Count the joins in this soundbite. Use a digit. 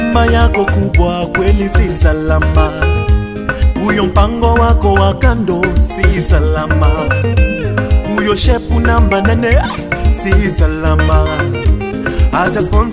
0